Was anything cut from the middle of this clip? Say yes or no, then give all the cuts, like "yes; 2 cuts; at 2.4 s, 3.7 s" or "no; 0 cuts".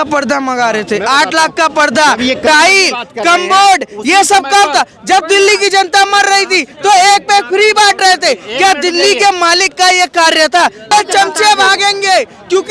yes; 1 cut; at 10.9 s